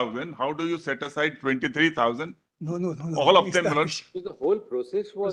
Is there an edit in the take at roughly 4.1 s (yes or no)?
no